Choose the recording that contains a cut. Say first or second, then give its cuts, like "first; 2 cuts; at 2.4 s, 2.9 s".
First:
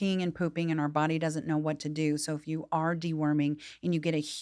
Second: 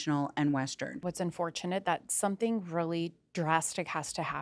second; 1 cut; at 1.1 s